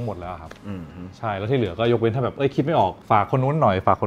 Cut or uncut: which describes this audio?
uncut